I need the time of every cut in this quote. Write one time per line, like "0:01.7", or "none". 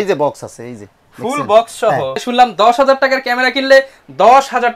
0:02.2

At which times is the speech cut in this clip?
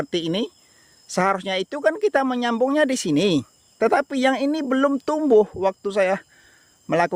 none

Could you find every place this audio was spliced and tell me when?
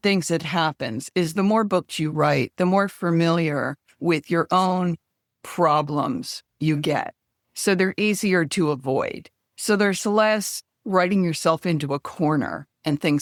none

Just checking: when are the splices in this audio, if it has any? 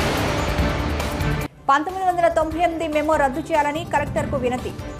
0:01.1

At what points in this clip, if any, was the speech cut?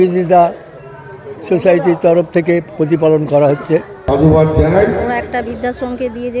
0:04.0

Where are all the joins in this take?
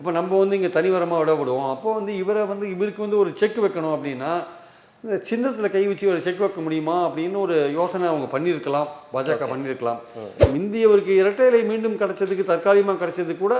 0:10.4

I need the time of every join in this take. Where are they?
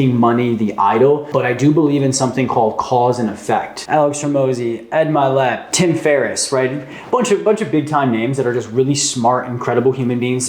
0:01.3
0:03.8
0:05.7

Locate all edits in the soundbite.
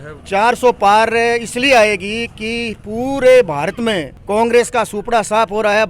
0:04.1

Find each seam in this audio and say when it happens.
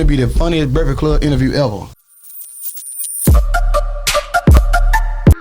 0:02.1

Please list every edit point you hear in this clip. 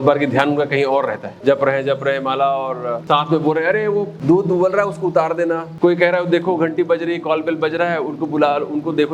0:01.3
0:03.0
0:04.1
0:05.7

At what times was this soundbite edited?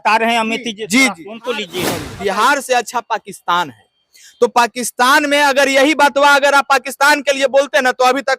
0:02.2

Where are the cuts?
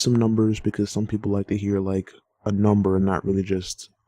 0:02.2

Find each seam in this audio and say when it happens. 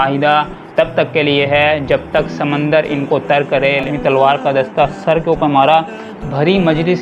0:03.9

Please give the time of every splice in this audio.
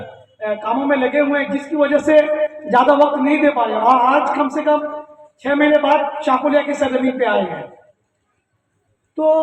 none

